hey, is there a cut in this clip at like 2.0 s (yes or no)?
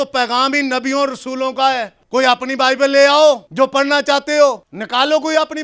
yes